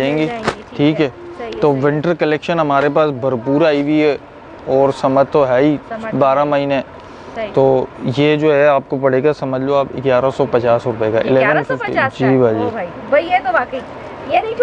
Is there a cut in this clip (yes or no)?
no